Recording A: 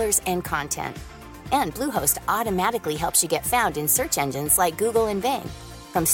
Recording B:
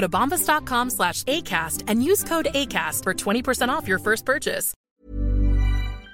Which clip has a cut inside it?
B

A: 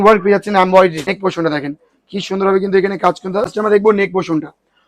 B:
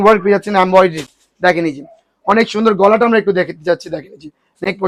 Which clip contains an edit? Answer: A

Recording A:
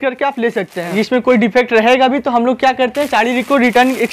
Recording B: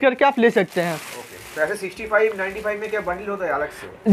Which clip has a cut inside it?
A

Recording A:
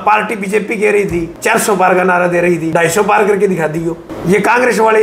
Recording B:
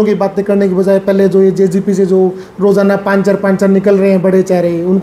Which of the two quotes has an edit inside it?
A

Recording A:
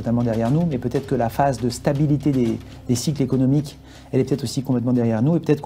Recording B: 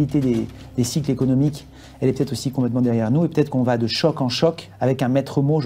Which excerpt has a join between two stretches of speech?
B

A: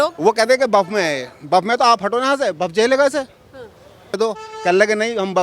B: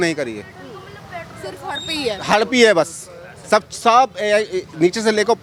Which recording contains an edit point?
A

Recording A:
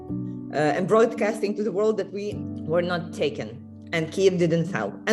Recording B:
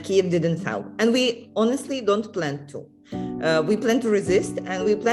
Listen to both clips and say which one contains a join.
A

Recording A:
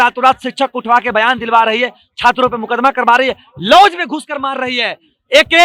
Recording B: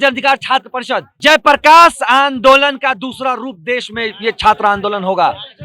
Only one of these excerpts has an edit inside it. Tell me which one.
B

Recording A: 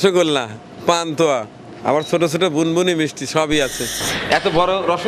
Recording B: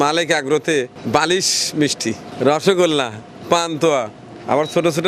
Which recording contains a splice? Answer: A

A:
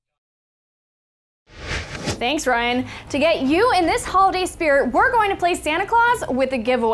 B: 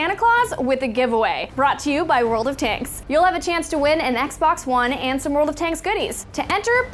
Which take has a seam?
A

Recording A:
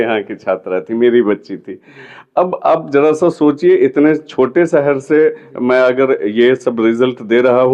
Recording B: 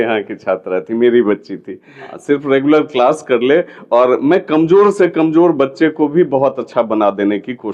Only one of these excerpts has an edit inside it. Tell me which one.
B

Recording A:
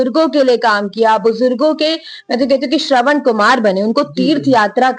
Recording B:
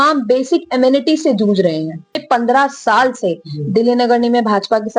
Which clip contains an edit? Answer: B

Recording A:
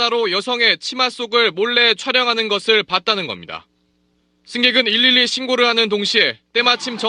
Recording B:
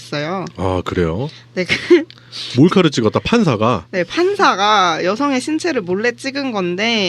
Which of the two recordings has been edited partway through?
B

